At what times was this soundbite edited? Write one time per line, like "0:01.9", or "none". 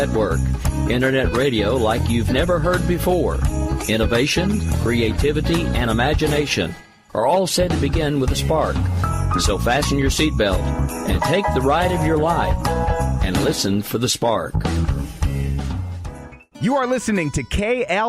0:16.4